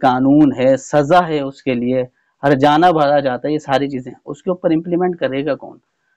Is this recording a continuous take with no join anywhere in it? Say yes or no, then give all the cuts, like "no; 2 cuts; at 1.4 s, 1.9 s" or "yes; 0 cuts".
yes; 0 cuts